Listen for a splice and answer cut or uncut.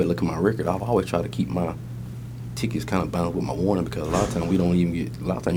uncut